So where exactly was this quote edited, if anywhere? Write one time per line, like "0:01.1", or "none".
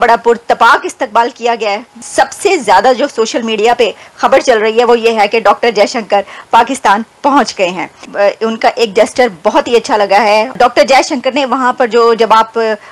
none